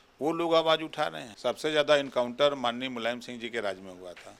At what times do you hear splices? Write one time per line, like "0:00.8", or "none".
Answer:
0:01.2

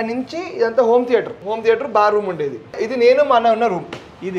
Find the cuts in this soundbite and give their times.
0:01.4
0:02.8

